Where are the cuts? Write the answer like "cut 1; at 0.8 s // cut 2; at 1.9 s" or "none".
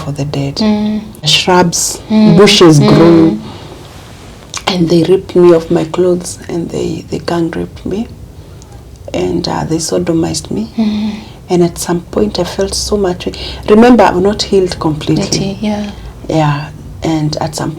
cut 1; at 1.3 s

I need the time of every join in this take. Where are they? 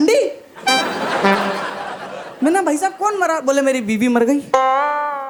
none

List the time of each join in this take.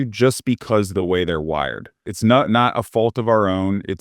cut 1; at 2.1 s

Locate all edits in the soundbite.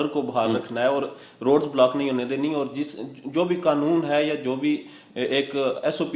none

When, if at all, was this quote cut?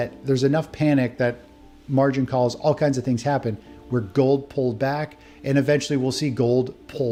none

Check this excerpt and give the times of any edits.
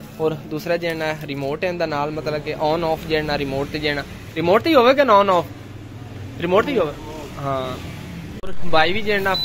cut 1; at 8.4 s

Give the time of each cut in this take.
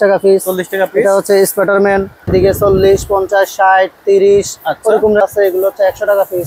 cut 1; at 2.3 s // cut 2; at 5.2 s

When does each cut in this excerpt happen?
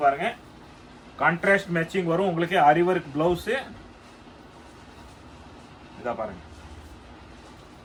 none

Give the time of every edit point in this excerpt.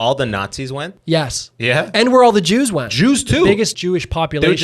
cut 1; at 0.9 s // cut 2; at 2.9 s // cut 3; at 3.8 s

